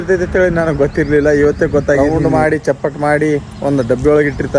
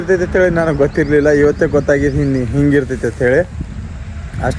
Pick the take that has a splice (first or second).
first